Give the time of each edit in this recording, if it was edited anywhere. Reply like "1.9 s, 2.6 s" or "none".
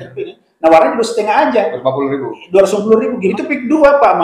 3.3 s